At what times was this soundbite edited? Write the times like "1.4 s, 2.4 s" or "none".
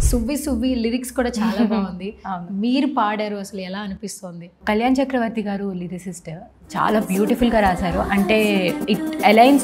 none